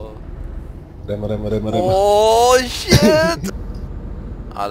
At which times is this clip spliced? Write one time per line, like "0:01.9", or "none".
0:03.5